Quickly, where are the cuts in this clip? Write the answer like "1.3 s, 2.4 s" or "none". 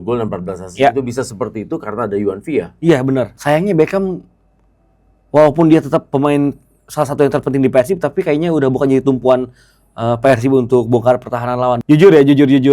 3.3 s, 11.8 s